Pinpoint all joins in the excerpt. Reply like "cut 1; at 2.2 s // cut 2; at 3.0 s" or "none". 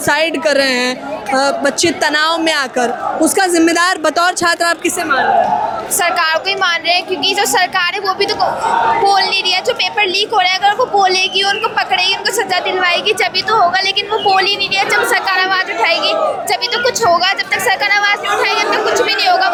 none